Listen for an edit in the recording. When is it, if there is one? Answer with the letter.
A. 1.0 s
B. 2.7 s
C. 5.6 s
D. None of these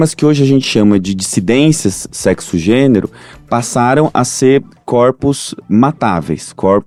D